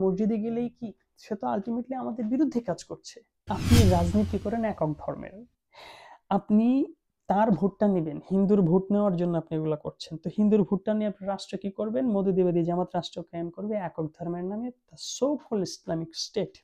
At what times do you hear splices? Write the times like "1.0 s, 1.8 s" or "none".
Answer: 3.5 s